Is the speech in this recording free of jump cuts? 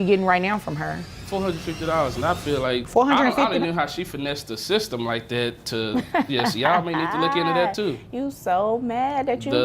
no; 2 cuts; at 1.1 s, 2.9 s

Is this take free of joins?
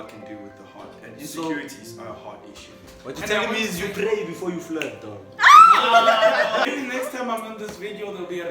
no; 1 cut; at 6.7 s

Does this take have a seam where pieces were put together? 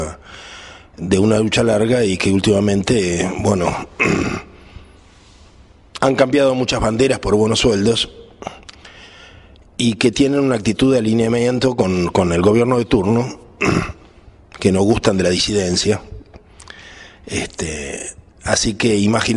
yes; 1 cut; at 8.0 s

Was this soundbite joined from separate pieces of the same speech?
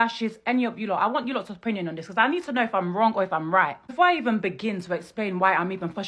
no; 0 cuts

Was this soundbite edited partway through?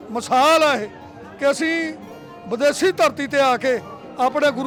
no; 0 cuts

